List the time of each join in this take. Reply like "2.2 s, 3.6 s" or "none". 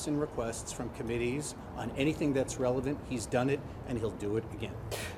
3.0 s